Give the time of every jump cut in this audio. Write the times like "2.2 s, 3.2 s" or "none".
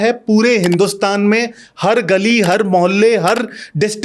none